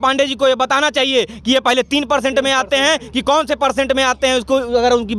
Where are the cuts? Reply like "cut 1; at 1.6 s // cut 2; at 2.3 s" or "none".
none